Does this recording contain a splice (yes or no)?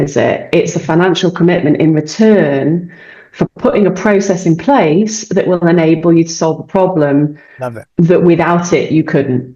no